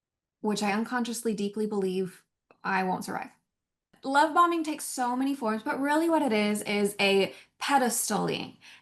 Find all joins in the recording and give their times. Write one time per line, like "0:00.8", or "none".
0:03.9